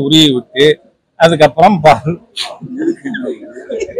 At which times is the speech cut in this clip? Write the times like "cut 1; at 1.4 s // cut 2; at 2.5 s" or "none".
none

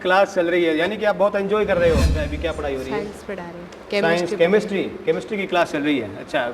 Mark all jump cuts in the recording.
cut 1; at 2.3 s

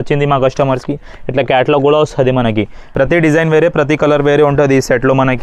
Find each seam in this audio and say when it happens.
cut 1; at 2.9 s

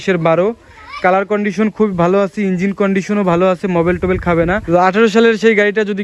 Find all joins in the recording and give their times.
cut 1; at 4.6 s

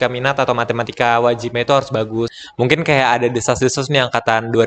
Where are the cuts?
cut 1; at 2.4 s

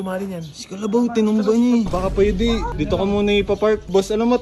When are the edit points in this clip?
cut 1; at 1.9 s

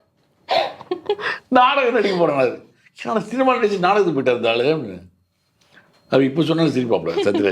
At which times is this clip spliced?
none

